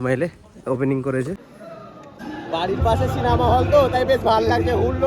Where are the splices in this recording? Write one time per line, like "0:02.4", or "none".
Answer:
0:01.5